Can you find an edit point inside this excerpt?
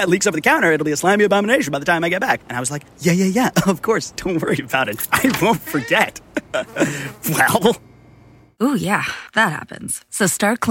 no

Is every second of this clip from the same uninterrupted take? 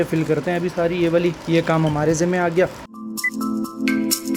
yes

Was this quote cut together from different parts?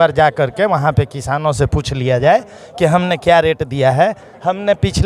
no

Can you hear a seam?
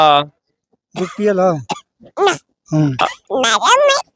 yes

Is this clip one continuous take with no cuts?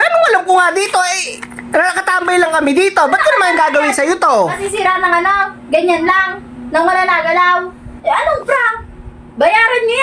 no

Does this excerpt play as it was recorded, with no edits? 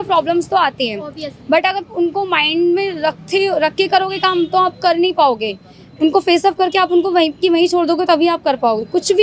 yes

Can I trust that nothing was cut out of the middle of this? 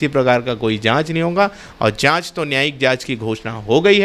yes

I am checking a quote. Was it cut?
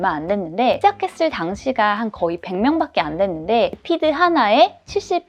yes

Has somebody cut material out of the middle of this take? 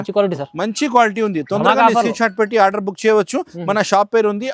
no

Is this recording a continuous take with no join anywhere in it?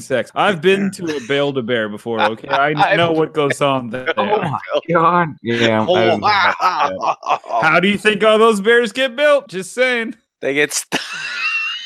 yes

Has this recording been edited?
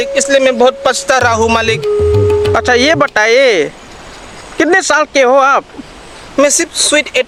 no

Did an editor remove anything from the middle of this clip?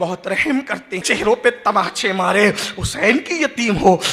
yes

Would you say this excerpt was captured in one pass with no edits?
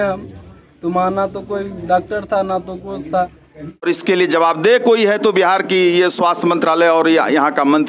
no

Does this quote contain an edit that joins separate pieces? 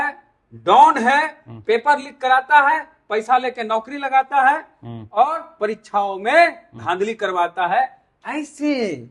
no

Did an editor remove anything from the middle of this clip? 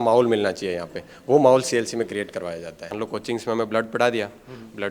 yes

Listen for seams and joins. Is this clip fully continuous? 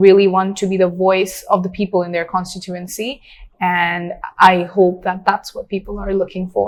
yes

